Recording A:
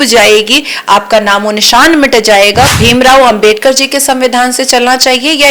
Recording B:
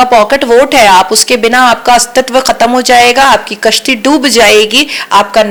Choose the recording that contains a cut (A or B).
A